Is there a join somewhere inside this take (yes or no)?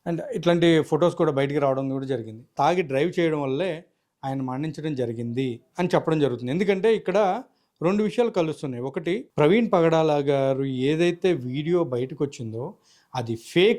yes